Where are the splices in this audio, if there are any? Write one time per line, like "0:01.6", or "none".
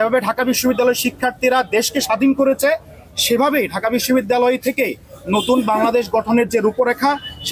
none